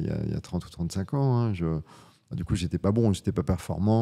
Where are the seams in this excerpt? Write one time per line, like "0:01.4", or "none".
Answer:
none